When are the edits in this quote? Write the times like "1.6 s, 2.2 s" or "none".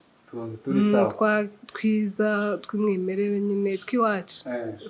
none